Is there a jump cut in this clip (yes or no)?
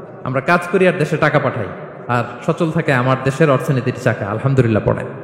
no